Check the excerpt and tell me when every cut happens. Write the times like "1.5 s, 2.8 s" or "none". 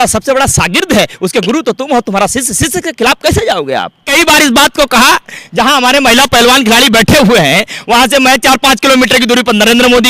4.1 s